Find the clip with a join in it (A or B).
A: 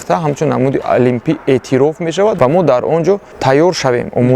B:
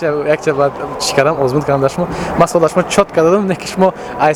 A